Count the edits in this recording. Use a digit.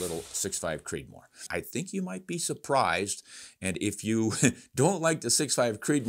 1